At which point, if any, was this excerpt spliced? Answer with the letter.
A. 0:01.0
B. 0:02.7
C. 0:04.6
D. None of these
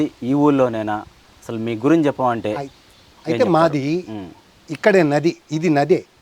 D